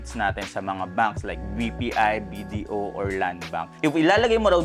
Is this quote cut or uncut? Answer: uncut